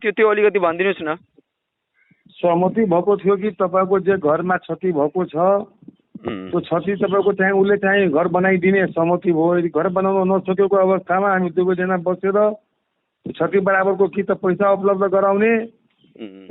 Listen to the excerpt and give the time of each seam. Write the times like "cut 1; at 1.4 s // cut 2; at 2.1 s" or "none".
none